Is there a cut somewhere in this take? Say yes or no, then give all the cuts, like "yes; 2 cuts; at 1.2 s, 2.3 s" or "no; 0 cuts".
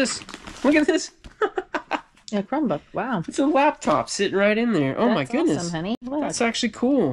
no; 0 cuts